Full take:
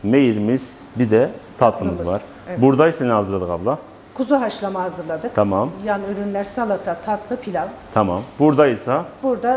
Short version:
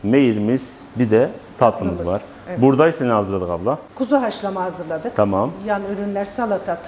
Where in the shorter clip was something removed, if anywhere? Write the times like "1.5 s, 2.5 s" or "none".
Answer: 3.9 s